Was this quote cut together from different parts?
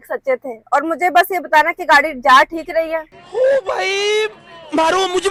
no; 0 cuts

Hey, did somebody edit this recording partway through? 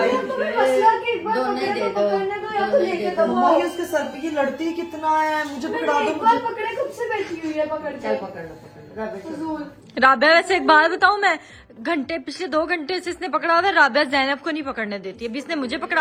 no; 0 cuts

